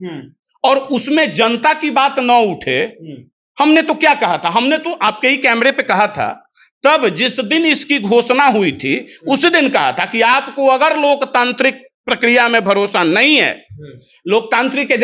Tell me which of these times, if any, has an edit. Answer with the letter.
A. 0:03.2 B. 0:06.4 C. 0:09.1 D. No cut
D